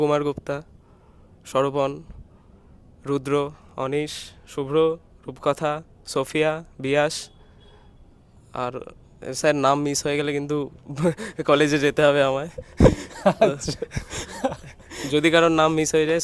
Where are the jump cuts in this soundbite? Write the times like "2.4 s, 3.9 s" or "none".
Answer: none